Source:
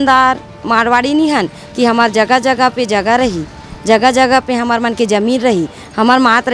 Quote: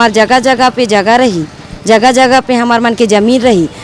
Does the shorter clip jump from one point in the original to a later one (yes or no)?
no